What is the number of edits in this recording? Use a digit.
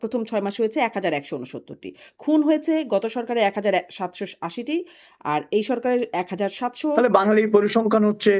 1